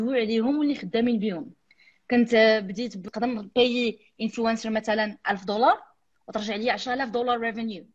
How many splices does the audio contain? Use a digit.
1